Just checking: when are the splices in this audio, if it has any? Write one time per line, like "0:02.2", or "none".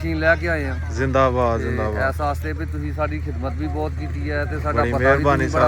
none